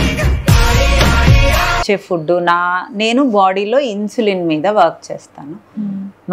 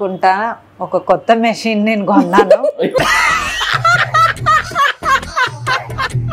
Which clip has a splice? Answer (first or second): first